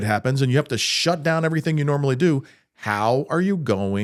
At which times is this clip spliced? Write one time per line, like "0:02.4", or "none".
none